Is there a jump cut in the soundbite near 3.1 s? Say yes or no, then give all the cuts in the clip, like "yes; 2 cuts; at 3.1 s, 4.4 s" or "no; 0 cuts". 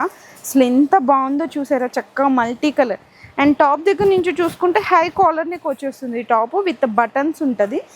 no; 0 cuts